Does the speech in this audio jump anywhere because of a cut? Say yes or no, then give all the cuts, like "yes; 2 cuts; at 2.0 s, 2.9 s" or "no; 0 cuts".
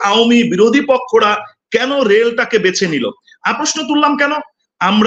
yes; 1 cut; at 3.6 s